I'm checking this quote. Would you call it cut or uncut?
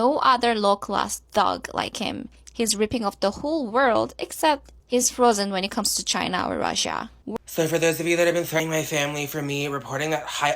cut